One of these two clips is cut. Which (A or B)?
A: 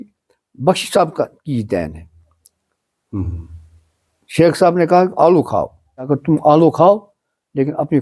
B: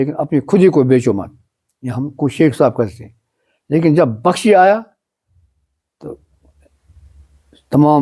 A